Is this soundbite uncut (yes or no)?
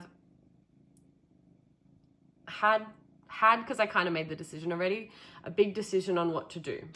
yes